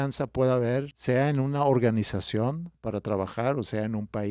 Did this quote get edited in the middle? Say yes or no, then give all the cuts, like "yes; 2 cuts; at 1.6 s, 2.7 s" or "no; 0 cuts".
yes; 2 cuts; at 0.9 s, 2.7 s